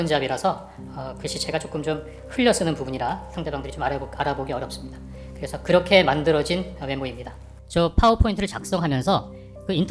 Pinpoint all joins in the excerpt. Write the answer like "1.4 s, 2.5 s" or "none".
none